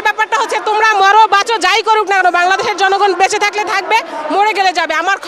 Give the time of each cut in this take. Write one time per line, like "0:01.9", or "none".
none